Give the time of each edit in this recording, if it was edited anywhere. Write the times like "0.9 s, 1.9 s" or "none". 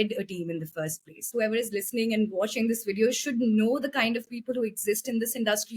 1.3 s